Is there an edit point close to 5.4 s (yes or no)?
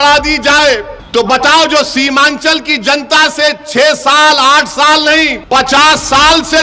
yes